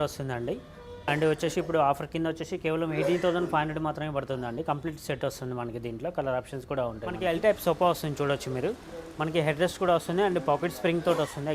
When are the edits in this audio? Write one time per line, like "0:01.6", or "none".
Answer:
0:01.1
0:07.2